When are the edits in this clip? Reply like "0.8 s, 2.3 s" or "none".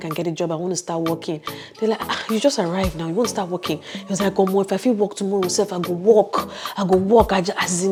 none